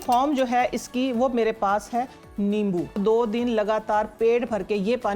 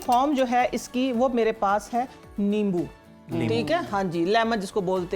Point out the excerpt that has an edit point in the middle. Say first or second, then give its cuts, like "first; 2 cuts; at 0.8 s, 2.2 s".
first; 1 cut; at 3.0 s